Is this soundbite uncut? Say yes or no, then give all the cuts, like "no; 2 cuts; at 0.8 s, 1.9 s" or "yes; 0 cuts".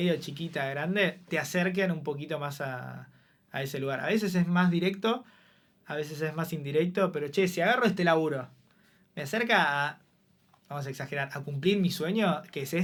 yes; 0 cuts